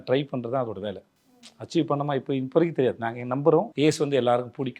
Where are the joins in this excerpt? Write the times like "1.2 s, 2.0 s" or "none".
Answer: 3.7 s